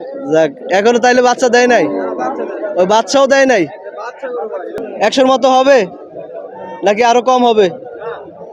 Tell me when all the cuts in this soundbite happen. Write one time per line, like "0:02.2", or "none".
0:04.8

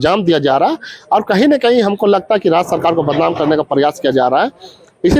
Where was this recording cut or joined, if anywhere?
none

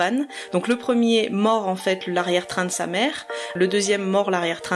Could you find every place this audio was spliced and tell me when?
0:03.6

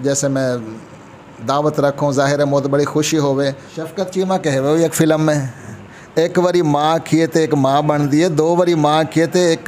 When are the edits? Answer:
0:03.7

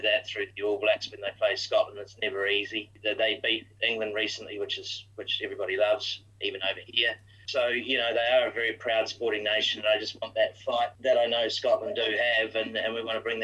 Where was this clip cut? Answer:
0:02.9
0:06.2
0:07.5
0:10.9

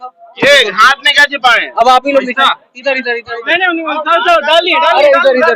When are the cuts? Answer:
none

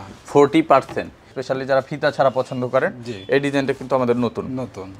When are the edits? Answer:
0:01.4

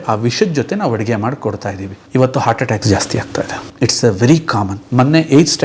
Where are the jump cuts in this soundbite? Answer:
0:01.9
0:03.6
0:04.8

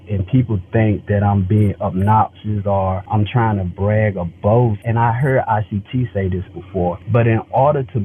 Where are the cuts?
0:03.0
0:04.8
0:07.0

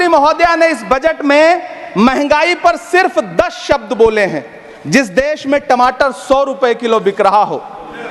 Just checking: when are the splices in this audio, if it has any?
none

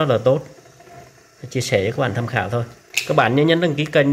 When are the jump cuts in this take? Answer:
0:02.9

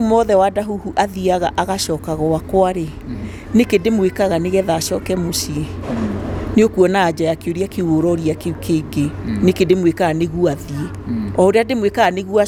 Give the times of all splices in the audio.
none

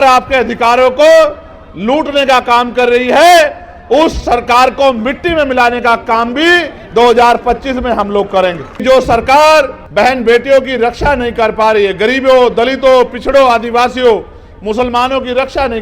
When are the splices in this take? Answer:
0:08.7
0:09.8

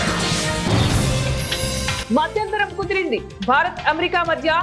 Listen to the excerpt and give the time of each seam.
none

